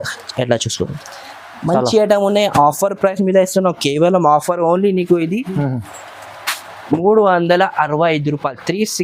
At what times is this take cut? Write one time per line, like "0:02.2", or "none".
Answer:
none

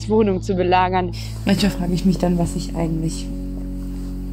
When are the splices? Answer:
0:01.2

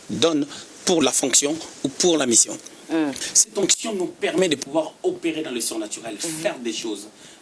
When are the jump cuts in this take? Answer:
0:01.0
0:03.2

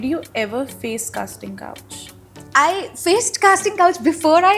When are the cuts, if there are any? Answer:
0:02.4

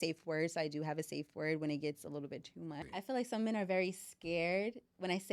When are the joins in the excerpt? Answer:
0:02.8

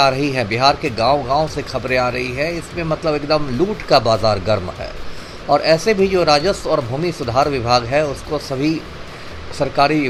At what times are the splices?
none

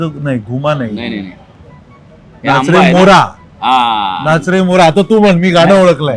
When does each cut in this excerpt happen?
none

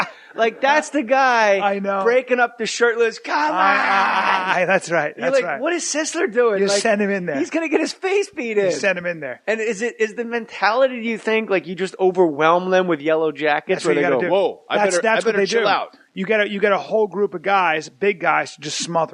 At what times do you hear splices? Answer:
0:06.9

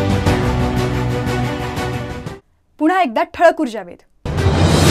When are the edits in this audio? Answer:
none

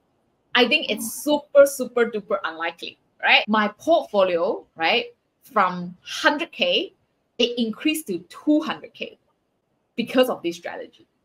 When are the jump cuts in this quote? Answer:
0:03.4

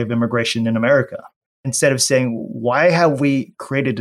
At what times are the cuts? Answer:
0:01.7

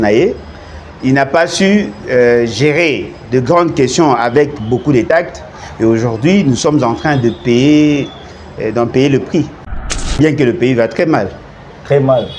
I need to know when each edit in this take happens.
0:10.1

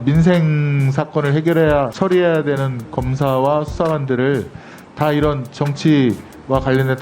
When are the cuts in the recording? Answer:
0:01.9

